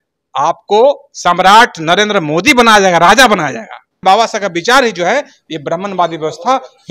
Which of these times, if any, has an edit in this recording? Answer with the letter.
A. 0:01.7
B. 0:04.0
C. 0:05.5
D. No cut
B